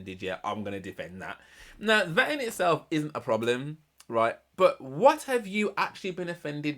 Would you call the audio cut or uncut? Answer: uncut